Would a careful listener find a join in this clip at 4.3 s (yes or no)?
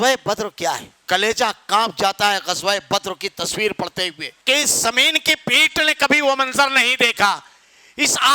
yes